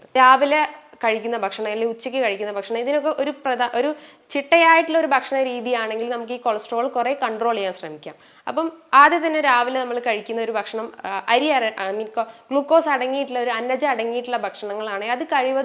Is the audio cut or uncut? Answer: uncut